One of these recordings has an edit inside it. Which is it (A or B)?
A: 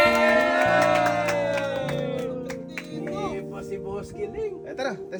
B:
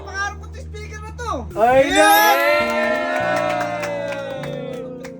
B